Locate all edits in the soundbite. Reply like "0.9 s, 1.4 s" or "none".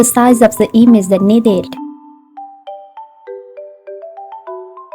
1.7 s